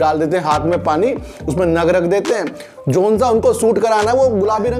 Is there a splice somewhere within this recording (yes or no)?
no